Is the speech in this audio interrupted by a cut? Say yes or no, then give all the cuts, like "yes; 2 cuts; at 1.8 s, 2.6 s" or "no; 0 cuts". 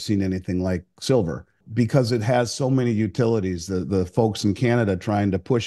yes; 1 cut; at 1.6 s